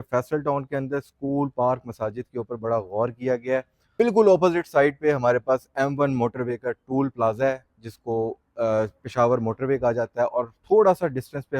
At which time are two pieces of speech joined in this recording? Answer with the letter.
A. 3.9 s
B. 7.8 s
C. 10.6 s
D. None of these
A